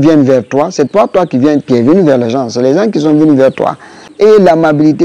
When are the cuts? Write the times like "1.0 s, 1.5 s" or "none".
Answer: 4.1 s